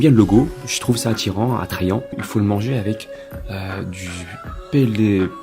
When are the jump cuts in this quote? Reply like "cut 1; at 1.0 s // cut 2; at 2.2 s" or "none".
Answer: cut 1; at 2.2 s